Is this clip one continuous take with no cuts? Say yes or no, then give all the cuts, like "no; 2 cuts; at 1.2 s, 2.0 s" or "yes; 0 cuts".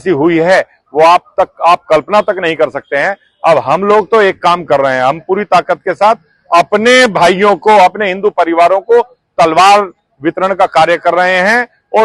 yes; 0 cuts